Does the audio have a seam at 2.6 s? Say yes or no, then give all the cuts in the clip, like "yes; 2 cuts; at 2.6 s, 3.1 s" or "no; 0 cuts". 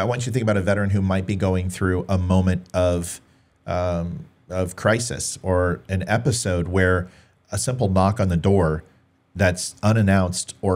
no; 0 cuts